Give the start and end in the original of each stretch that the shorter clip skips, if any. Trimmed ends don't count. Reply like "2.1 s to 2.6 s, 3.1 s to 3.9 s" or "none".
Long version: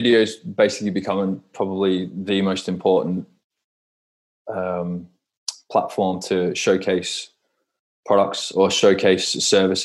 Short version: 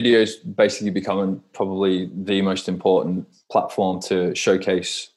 3.3 s to 5.5 s